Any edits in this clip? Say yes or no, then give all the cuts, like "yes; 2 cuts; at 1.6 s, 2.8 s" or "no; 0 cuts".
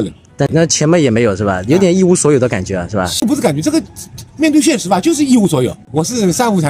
yes; 2 cuts; at 3.2 s, 5.8 s